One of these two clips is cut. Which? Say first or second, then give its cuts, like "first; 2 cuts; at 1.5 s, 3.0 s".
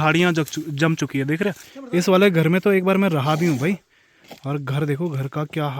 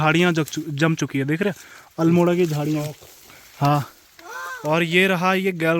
first; 1 cut; at 1.7 s